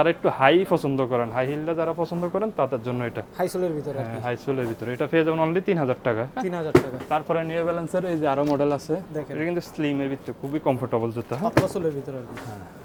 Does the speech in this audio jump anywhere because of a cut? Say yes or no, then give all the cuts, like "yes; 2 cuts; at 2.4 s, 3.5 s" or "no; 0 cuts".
no; 0 cuts